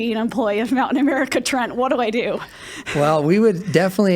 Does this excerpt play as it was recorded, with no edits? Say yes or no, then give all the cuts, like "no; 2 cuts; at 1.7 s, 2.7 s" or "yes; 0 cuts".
yes; 0 cuts